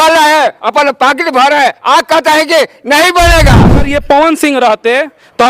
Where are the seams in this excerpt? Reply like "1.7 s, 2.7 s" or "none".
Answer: 3.9 s